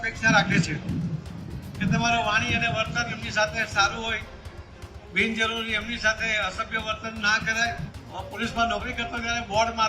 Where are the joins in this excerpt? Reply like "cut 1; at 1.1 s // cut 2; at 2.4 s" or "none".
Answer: cut 1; at 7.9 s